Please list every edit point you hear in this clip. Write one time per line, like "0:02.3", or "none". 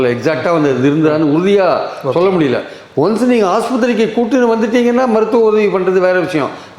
none